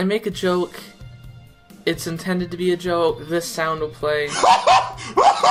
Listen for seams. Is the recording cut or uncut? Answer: uncut